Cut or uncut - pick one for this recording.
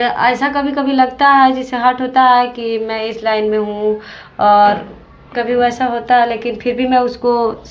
uncut